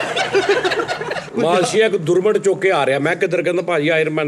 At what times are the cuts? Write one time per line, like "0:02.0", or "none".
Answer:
0:01.2